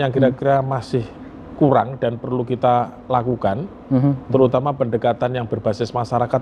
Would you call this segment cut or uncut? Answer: uncut